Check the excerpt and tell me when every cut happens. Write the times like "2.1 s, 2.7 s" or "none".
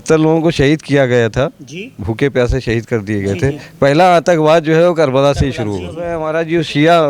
6.1 s

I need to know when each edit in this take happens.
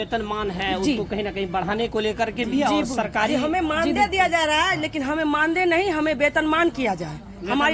none

